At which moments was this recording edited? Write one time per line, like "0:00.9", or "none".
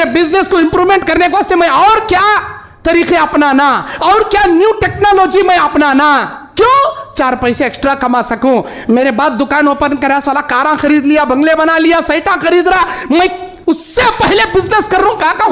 none